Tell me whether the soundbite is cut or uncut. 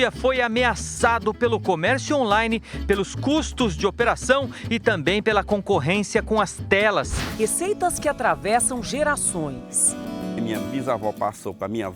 cut